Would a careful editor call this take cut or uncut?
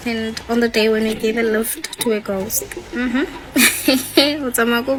uncut